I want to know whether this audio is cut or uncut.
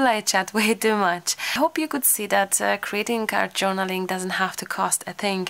cut